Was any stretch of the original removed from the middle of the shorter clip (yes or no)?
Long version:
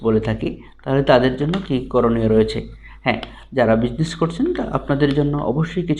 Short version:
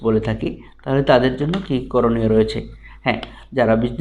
no